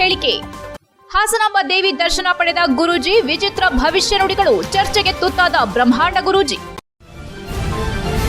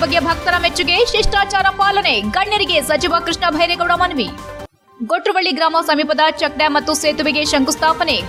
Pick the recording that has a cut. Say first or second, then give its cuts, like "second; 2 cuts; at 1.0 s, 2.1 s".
first; 1 cut; at 6.8 s